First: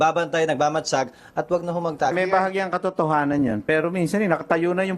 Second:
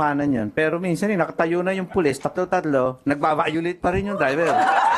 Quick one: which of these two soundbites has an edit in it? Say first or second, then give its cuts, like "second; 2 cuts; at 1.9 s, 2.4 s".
first; 1 cut; at 2.1 s